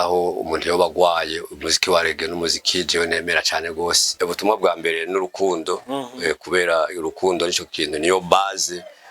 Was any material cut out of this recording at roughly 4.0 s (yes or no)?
yes